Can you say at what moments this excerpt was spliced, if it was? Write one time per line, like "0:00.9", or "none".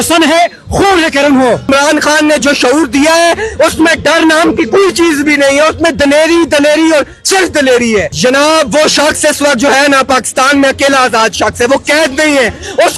0:01.7
0:08.1

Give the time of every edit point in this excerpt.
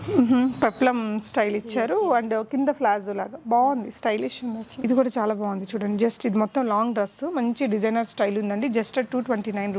0:04.8

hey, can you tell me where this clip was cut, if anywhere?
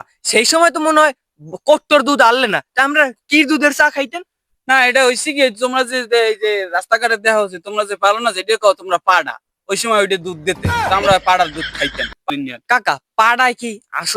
0:12.3

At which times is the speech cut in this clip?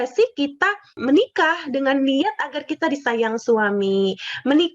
0:01.0

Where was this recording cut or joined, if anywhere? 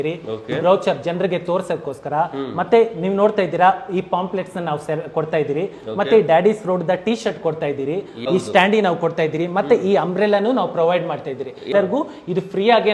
0:08.1
0:11.7

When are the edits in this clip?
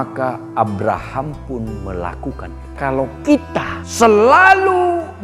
0:02.7
0:03.8

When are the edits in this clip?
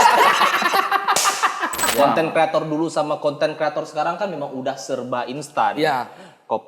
0:01.9

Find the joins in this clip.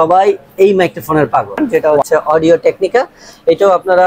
0:01.6

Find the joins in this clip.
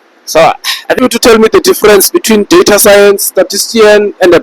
0:01.0

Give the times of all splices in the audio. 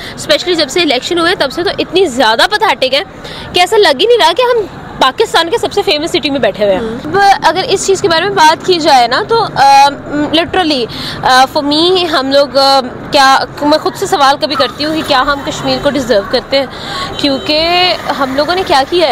0:07.1

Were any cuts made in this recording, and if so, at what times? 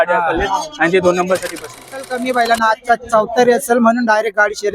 0:02.1

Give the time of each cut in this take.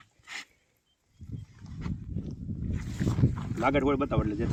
none

